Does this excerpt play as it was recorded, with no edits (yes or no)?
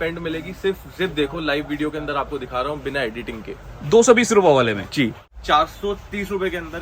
no